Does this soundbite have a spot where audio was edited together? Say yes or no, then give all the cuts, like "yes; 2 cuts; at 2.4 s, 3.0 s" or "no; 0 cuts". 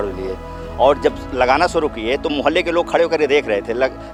no; 0 cuts